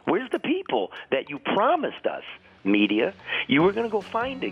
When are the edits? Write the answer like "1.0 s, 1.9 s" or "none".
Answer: none